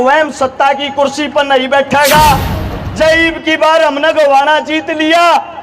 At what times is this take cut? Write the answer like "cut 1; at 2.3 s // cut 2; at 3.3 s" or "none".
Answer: cut 1; at 2.6 s

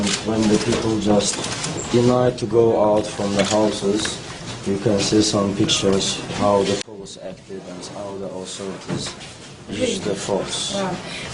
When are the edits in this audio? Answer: cut 1; at 9.7 s

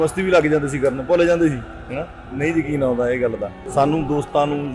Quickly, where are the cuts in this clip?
cut 1; at 3.5 s

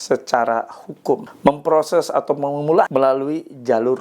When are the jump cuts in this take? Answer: cut 1; at 1.3 s // cut 2; at 2.9 s

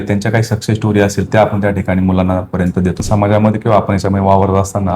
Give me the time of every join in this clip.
cut 1; at 3.0 s

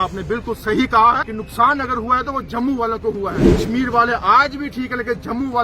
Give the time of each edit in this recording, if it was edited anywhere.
cut 1; at 1.3 s // cut 2; at 3.5 s

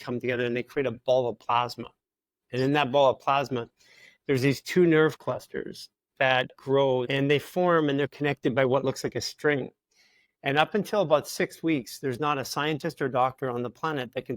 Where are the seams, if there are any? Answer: cut 1; at 7.1 s

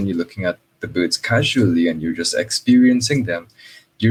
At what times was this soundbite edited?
none

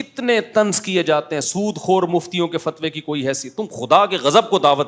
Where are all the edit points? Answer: none

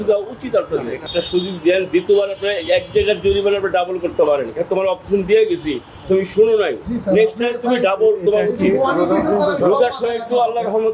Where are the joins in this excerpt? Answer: none

